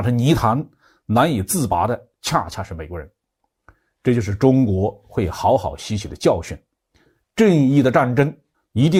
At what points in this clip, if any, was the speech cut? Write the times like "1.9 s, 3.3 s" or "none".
none